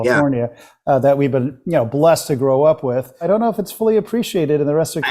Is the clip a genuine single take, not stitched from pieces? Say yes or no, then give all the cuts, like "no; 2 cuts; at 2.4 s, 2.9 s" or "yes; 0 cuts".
no; 1 cut; at 3.3 s